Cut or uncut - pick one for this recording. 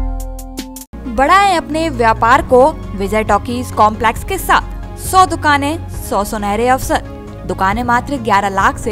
uncut